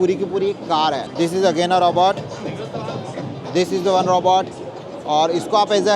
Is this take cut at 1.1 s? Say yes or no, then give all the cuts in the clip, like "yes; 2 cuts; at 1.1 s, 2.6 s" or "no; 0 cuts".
yes; 1 cut; at 1.1 s